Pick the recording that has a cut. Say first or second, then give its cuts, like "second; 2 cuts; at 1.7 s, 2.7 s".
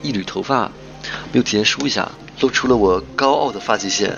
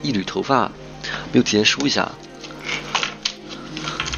first; 1 cut; at 2.2 s